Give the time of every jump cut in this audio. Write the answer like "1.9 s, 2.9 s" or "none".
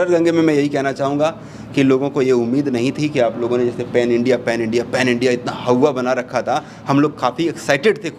none